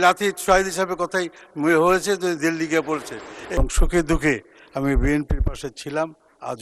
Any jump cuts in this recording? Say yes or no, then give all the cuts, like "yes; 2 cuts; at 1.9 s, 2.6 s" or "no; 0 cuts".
yes; 1 cut; at 3.6 s